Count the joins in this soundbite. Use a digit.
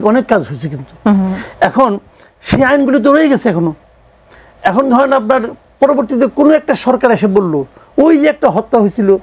0